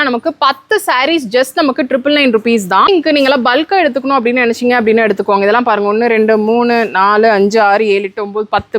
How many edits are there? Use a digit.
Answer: 1